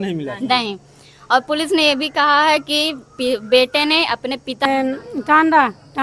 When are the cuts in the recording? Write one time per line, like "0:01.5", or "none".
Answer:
0:04.7